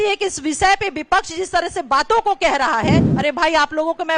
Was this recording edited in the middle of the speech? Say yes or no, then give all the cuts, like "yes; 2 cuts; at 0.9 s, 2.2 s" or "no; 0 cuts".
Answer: yes; 1 cut; at 3.1 s